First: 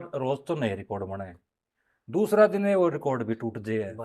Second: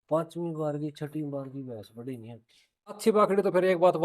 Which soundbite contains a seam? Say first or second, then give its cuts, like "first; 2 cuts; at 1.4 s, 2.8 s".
second; 1 cut; at 3.0 s